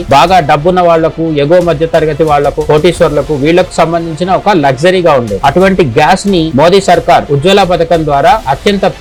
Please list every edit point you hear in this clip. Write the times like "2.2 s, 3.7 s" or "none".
none

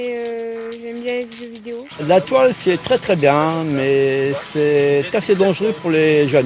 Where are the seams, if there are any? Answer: 1.9 s

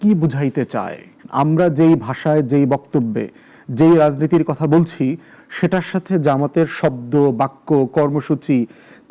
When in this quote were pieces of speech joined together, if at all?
1.2 s

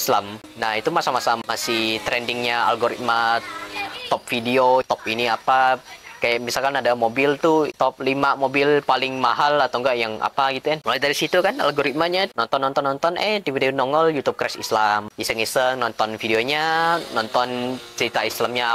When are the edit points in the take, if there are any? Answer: 7.7 s, 10.8 s

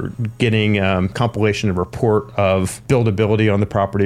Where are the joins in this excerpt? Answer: 1.1 s, 2.8 s

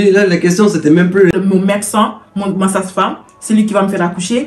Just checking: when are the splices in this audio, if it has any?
1.3 s

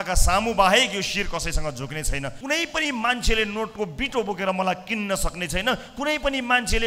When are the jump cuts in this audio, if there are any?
2.4 s

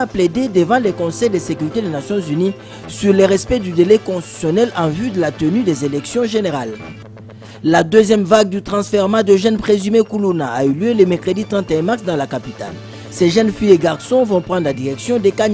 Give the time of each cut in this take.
none

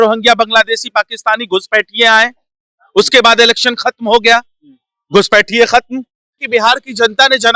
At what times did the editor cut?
6.4 s

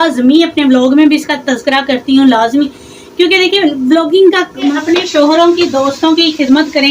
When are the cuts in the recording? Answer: 4.8 s

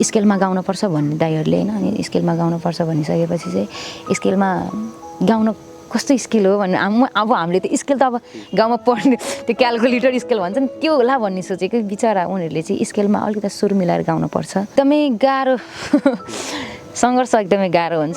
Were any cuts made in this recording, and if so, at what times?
14.7 s

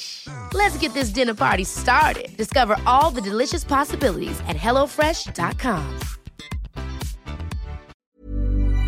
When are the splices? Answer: 7.9 s

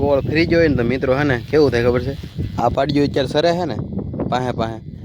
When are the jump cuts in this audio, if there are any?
none

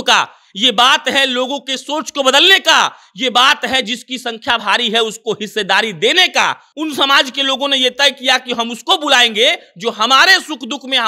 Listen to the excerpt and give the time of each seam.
6.6 s

